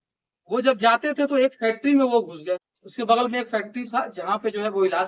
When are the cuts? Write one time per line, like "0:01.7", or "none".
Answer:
0:02.8